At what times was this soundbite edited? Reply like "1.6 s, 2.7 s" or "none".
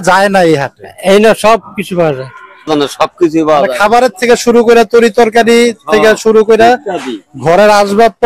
2.7 s